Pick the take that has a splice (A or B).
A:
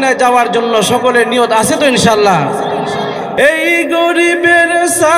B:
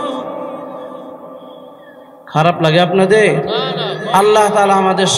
A